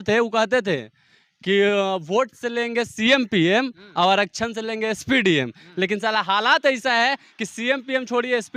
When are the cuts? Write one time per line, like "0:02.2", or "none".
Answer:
none